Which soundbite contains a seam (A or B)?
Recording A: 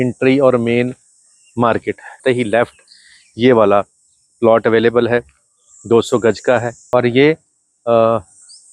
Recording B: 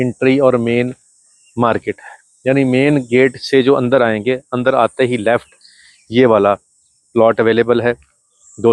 A